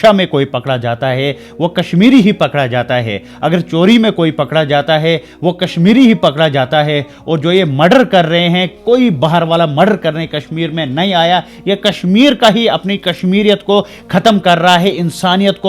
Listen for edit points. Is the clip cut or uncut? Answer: uncut